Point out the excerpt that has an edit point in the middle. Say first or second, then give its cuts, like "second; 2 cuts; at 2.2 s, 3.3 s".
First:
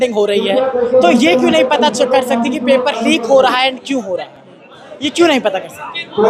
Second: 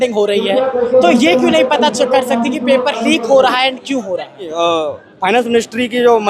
second; 1 cut; at 4.5 s